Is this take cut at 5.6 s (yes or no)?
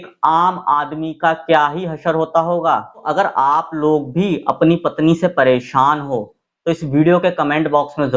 no